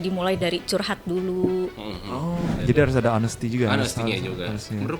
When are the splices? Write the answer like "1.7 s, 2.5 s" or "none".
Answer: 2.6 s